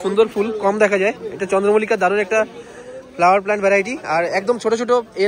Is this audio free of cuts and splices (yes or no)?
yes